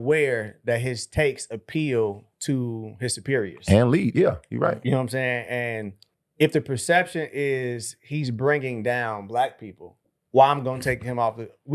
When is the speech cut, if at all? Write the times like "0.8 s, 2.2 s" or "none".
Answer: none